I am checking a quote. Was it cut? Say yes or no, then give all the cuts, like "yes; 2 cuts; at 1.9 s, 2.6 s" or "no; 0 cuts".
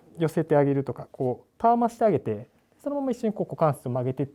no; 0 cuts